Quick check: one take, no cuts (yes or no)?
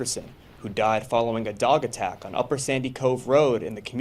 no